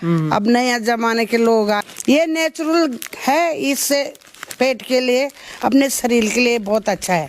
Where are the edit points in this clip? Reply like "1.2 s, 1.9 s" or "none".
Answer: 1.8 s